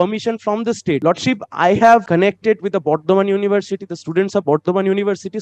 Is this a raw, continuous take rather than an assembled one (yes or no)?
no